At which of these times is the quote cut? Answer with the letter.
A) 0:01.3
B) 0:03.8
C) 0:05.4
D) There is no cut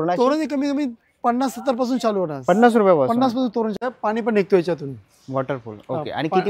B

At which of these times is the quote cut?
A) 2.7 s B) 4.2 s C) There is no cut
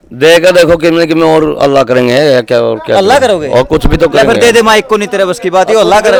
C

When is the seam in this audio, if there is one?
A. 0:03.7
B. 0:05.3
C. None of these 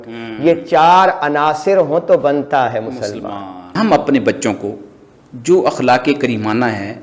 A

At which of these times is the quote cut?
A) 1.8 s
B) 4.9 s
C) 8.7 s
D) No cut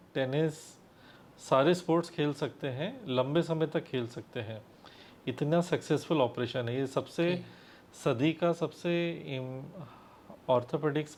D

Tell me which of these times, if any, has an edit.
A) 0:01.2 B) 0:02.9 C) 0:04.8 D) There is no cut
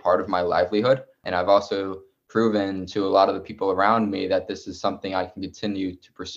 A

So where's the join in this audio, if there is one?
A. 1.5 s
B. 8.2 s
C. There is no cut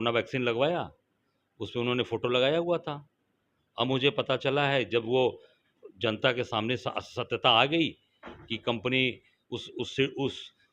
C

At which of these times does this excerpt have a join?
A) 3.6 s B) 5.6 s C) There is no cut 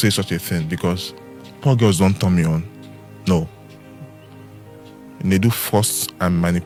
C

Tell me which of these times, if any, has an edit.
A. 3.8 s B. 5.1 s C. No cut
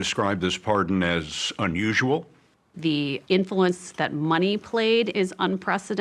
B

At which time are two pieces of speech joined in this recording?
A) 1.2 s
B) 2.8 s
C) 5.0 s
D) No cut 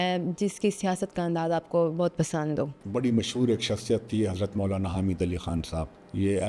B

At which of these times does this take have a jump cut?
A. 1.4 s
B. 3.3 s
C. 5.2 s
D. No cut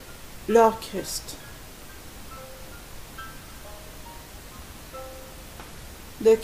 B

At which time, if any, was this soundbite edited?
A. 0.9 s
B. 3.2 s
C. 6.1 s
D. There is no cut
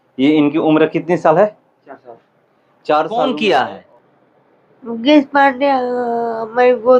B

